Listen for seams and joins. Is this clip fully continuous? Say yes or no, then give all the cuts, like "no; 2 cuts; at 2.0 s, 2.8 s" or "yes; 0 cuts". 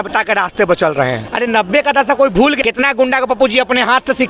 no; 2 cuts; at 1.3 s, 2.6 s